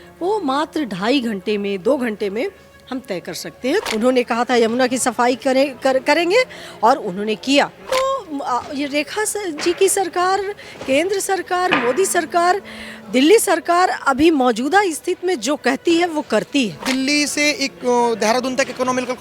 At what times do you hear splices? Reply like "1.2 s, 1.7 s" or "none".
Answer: 3.8 s, 7.8 s, 16.8 s